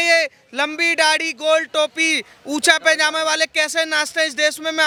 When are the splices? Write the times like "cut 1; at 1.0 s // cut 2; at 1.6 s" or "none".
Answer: none